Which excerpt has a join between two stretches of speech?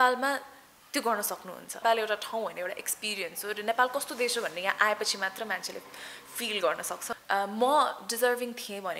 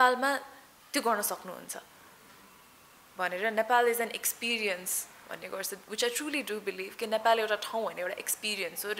first; 2 cuts; at 1.8 s, 7.1 s

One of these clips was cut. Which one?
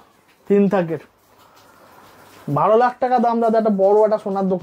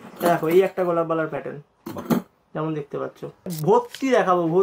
second; 1 cut; at 3.5 s

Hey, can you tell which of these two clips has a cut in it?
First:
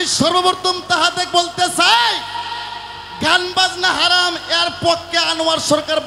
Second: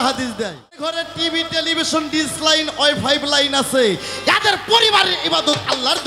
second; 1 cut; at 1.0 s

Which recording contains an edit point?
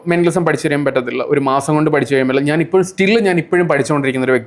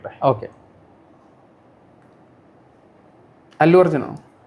second; 1 cut; at 2.8 s

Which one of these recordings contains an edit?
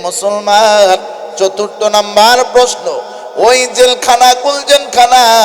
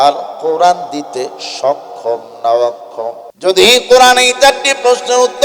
second; 1 cut; at 3.3 s

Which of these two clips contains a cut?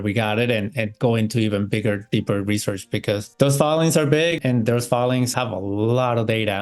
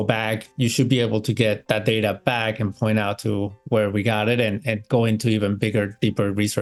first; 2 cuts; at 4.4 s, 5.3 s

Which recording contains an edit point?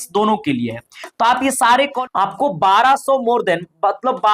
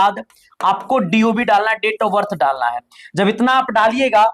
first; 1 cut; at 2.0 s

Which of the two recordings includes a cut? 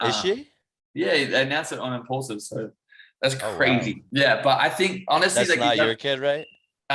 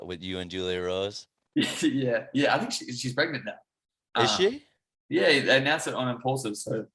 first; 1 cut; at 4.0 s

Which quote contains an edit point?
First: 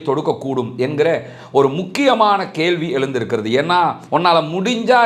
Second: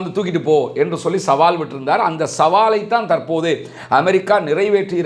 first; 1 cut; at 4.0 s

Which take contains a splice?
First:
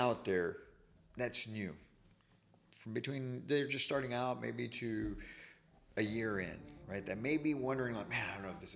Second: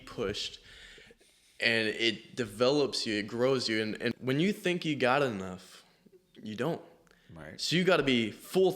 second; 1 cut; at 4.1 s

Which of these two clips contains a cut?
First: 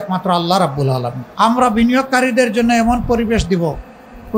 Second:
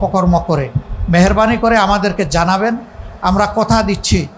first; 1 cut; at 1.2 s

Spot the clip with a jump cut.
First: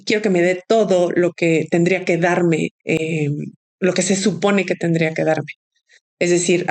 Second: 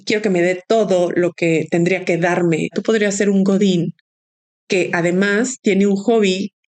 second; 1 cut; at 2.8 s

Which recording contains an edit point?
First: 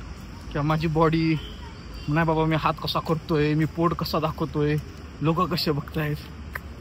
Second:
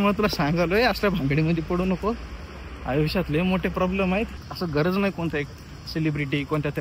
second; 1 cut; at 4.4 s

